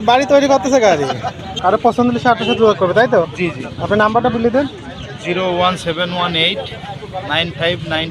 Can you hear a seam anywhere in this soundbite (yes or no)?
yes